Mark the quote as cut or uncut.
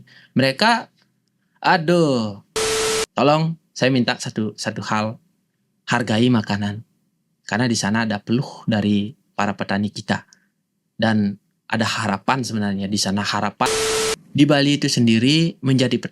cut